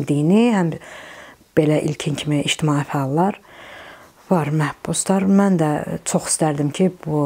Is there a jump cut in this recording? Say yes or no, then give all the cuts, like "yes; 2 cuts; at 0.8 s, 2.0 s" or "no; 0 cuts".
no; 0 cuts